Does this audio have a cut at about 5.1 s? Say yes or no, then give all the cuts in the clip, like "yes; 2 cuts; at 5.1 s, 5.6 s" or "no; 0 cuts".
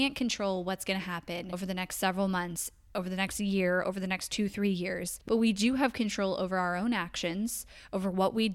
yes; 2 cuts; at 1.5 s, 5.1 s